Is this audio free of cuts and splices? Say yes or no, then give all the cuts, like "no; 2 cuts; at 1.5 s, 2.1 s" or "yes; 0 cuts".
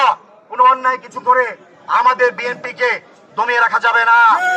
yes; 0 cuts